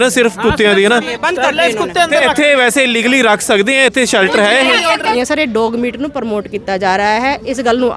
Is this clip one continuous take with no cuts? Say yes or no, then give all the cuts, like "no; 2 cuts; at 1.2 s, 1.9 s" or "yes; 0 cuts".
no; 2 cuts; at 1.1 s, 5.1 s